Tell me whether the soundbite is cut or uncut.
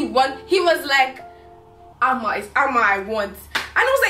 uncut